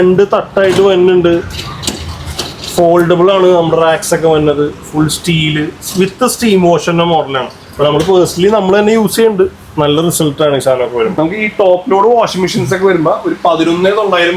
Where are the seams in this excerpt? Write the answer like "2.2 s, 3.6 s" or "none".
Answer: 11.1 s